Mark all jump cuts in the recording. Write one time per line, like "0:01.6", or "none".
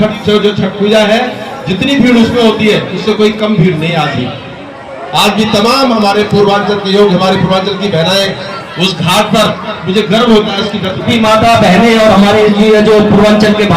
0:11.0